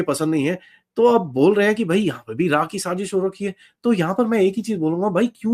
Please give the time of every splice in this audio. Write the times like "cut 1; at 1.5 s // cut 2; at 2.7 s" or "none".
none